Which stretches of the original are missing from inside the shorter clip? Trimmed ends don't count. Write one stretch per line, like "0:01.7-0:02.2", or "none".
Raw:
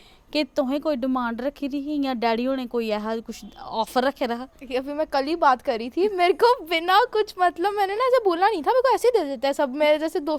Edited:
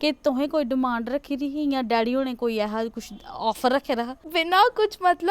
0:04.6-0:06.7